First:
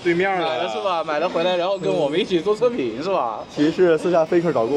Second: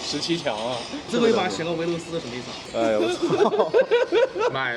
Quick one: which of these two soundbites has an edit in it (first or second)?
second